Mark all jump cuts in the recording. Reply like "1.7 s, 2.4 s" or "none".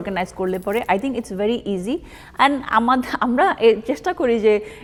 none